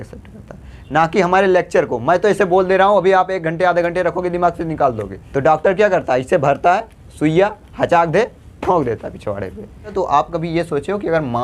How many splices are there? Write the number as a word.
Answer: two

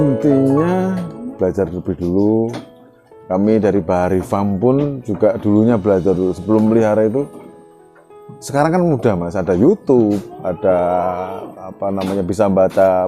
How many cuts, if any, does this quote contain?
one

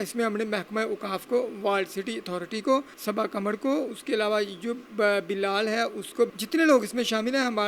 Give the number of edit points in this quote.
one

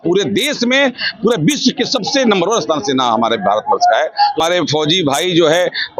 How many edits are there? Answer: one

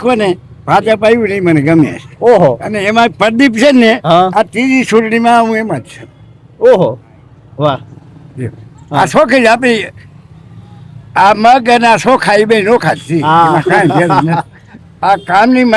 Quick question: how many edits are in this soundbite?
zero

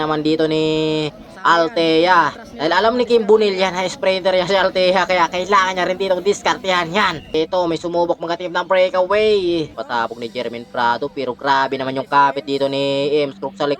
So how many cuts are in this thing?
three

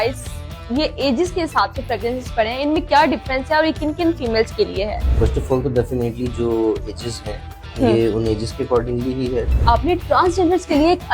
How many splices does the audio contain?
two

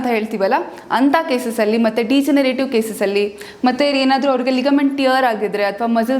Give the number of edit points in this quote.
zero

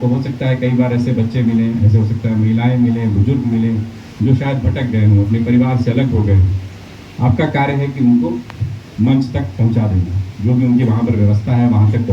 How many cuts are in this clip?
zero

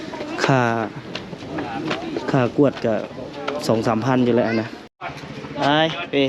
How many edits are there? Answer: one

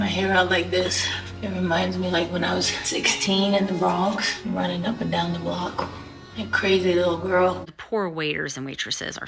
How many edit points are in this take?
one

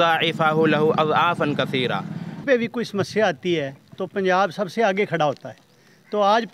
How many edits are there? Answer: one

